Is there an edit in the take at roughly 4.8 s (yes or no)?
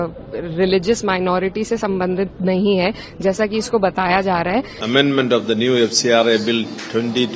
yes